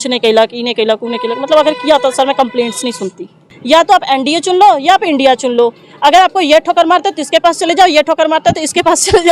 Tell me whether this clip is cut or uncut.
cut